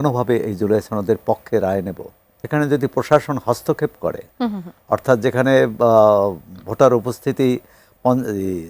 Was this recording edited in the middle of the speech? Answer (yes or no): yes